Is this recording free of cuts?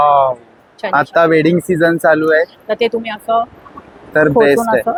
yes; 0 cuts

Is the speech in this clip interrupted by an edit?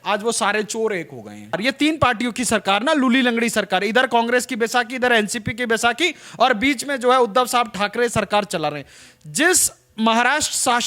yes; 1 cut; at 1.6 s

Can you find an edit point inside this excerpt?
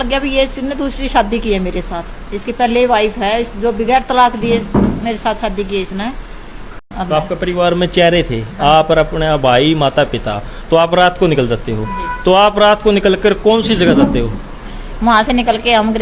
yes; 1 cut; at 6.9 s

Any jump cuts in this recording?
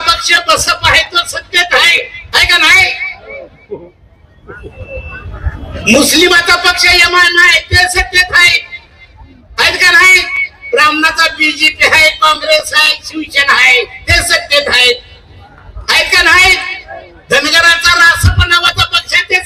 no; 0 cuts

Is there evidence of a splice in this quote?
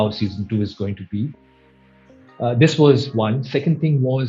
no; 0 cuts

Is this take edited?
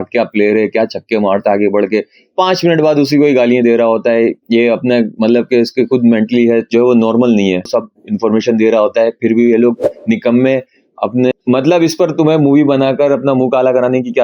yes; 2 cuts; at 7.7 s, 11.3 s

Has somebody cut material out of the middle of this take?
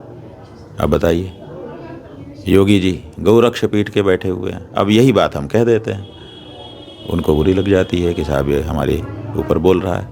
no; 0 cuts

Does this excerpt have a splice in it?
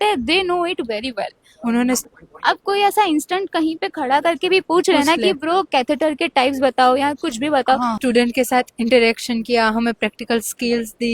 yes; 2 cuts; at 2.1 s, 8.0 s

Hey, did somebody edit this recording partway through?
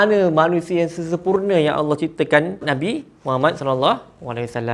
yes; 1 cut; at 2.6 s

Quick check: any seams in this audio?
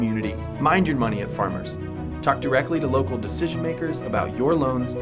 no; 0 cuts

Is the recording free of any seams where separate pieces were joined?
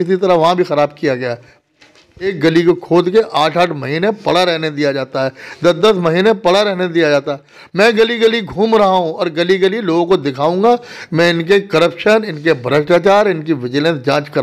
no; 1 cut; at 2.3 s

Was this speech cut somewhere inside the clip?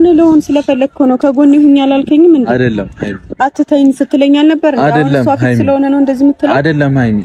no; 0 cuts

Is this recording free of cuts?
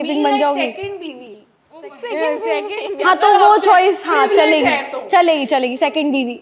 yes; 0 cuts

